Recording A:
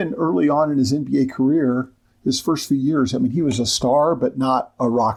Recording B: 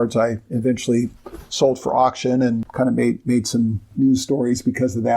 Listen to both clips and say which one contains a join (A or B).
B